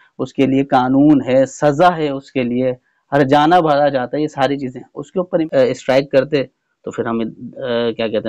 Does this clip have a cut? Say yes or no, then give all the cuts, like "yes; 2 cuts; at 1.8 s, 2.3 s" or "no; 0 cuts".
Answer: yes; 1 cut; at 5.5 s